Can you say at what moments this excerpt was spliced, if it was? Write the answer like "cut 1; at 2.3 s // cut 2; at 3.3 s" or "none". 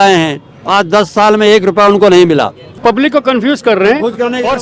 cut 1; at 2.7 s